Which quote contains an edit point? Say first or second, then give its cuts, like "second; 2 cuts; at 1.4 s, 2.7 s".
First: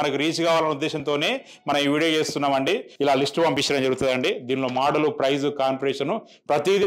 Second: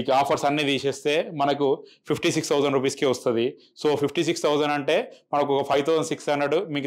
first; 1 cut; at 2.9 s